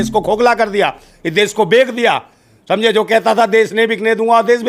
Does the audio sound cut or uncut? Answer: uncut